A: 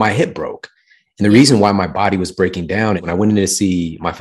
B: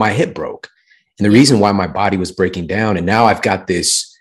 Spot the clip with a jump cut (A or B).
A